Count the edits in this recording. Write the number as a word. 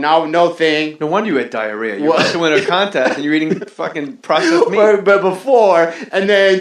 one